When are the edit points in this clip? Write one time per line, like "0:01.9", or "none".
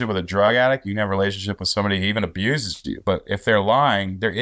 none